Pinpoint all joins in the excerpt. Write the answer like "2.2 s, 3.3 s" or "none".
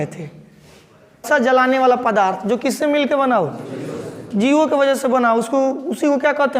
1.2 s